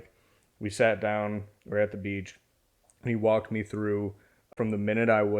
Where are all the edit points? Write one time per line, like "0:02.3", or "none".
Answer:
0:04.4

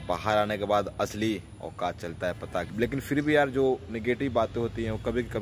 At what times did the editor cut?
0:02.7

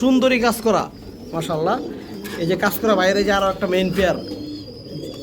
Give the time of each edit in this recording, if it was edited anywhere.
none

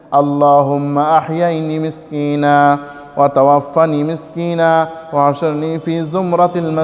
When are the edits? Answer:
none

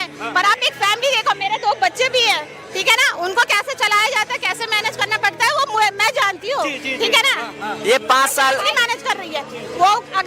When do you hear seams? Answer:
0:08.7

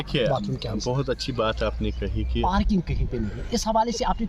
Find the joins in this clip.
0:02.4

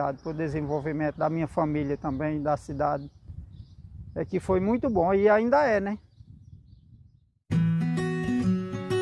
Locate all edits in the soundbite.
0:07.4

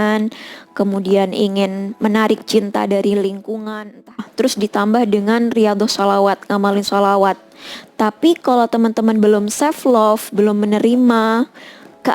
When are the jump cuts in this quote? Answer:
0:04.2

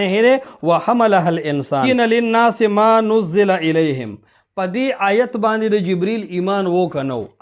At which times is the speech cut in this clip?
0:01.8

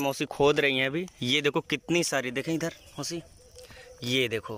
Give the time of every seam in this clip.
none

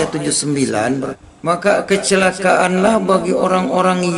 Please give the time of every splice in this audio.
0:01.1

